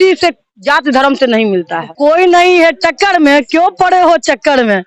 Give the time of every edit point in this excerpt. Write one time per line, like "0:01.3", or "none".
0:01.8